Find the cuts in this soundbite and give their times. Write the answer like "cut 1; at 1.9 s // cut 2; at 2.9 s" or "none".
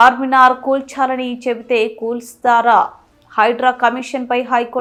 none